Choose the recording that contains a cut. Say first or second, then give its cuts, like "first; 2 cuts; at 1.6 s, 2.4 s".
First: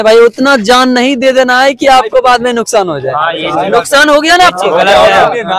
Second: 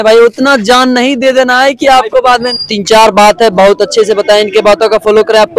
second; 1 cut; at 2.6 s